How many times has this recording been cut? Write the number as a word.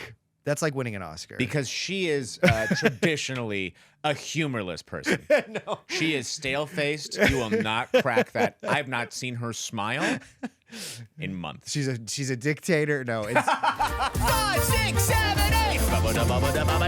one